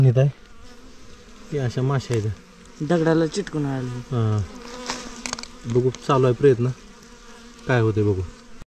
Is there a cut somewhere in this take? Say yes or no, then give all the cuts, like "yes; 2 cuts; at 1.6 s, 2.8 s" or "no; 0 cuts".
no; 0 cuts